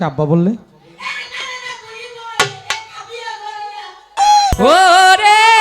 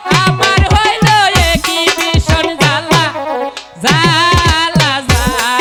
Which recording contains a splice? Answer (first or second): first